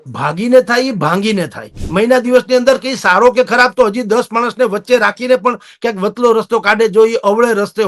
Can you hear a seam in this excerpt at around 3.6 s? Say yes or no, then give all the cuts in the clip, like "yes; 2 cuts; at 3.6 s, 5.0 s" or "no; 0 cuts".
no; 1 cut; at 1.8 s